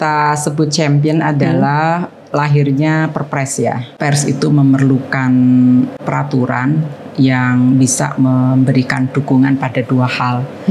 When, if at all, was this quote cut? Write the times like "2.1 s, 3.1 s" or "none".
3.9 s, 6.0 s